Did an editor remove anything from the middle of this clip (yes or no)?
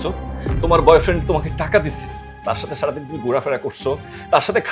no